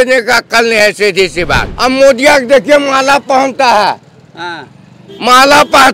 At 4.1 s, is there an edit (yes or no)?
no